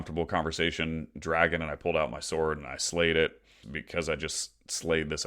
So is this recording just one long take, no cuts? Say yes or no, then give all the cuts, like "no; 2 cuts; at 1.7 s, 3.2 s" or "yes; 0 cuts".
no; 1 cut; at 3.7 s